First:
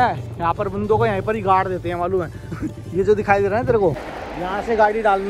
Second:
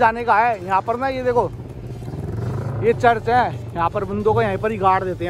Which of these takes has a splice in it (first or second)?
first